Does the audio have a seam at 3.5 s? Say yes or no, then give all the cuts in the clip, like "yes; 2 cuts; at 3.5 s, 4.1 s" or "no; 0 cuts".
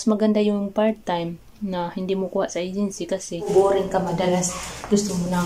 yes; 1 cut; at 3.5 s